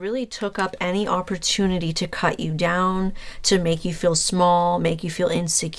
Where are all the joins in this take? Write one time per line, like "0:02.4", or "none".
none